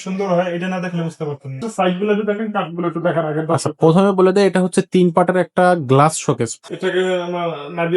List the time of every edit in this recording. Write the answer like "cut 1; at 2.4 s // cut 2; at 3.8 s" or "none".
cut 1; at 1.6 s // cut 2; at 6.6 s